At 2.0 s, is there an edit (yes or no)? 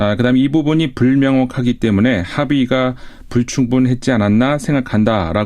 yes